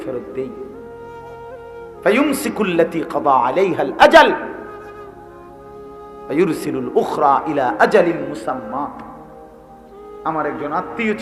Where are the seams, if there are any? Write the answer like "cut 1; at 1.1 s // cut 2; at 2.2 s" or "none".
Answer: cut 1; at 4.7 s // cut 2; at 6.3 s